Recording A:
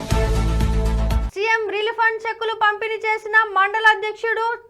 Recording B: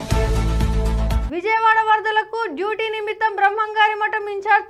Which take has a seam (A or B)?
A